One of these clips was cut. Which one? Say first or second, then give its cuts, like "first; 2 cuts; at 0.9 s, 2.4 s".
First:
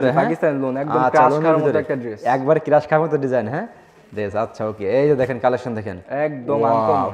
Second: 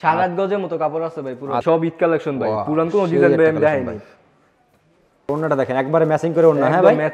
second; 2 cuts; at 1.6 s, 5.3 s